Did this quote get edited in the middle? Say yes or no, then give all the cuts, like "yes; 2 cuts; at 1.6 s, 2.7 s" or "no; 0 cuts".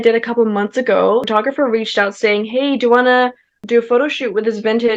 yes; 1 cut; at 1.3 s